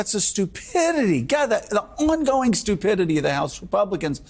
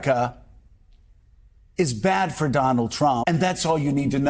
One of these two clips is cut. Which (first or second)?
second